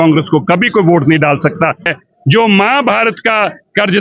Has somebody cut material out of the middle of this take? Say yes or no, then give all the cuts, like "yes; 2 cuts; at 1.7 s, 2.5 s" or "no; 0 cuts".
yes; 1 cut; at 1.9 s